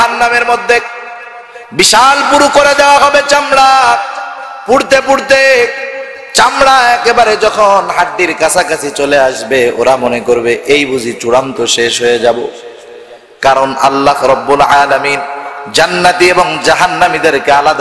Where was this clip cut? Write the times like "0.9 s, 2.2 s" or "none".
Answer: none